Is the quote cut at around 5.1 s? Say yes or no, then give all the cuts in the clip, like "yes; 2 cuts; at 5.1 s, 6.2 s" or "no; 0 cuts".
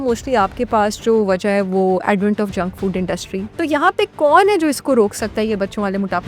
no; 1 cut; at 3.5 s